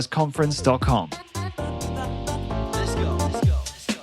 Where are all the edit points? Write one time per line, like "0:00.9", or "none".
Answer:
0:01.7